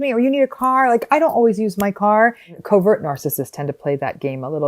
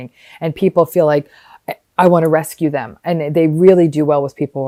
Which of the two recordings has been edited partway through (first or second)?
first